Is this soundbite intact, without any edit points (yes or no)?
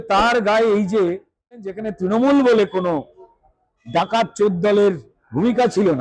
no